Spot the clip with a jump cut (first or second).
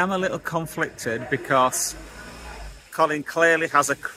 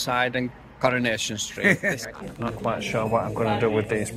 second